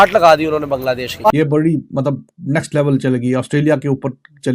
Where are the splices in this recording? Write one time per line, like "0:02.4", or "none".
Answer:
0:01.1